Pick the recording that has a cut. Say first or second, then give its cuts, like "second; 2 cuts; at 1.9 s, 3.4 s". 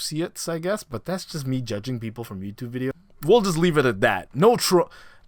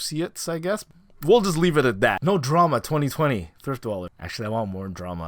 second; 3 cuts; at 1.0 s, 2.2 s, 4.2 s